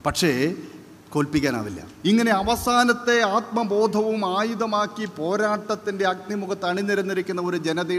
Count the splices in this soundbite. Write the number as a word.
one